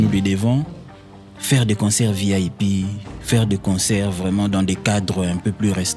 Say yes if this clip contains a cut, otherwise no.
no